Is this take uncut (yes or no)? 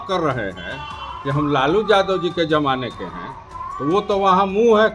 yes